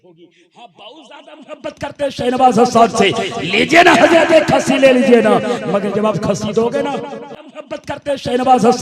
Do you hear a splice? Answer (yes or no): yes